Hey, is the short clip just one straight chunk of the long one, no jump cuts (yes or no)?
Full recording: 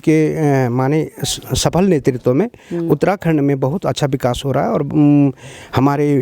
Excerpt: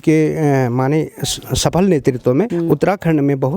no